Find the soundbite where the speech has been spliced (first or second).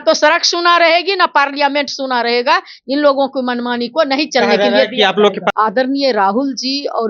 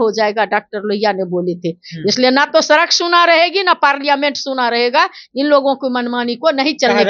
first